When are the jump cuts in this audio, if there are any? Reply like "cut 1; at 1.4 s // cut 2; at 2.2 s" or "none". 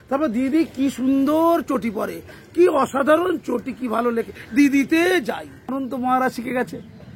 cut 1; at 5.7 s